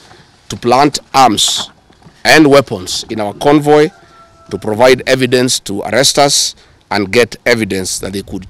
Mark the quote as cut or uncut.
uncut